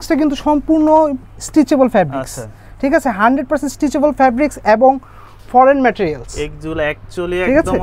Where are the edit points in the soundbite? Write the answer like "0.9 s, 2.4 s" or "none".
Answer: none